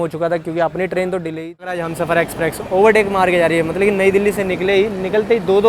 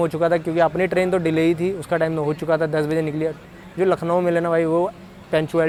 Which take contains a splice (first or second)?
first